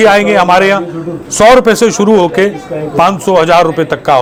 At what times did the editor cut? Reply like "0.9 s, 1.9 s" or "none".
none